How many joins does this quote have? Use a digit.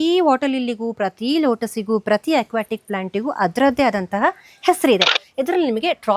1